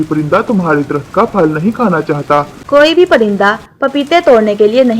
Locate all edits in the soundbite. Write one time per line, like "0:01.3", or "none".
0:02.6